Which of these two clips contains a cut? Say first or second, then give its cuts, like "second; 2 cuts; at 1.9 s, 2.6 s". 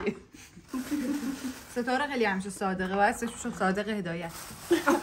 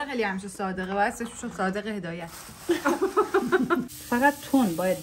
second; 1 cut; at 3.9 s